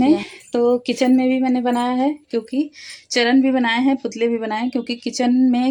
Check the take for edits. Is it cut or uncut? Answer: uncut